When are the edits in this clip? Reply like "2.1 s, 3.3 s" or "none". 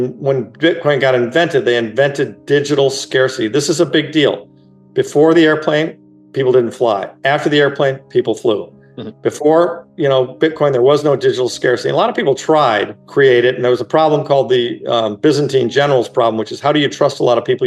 13.0 s